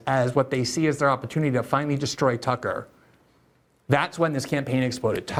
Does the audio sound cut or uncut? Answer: uncut